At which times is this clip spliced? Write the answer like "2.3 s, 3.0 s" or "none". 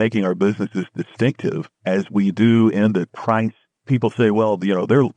1.7 s, 3.4 s